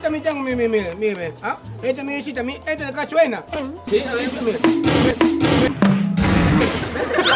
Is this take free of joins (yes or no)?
yes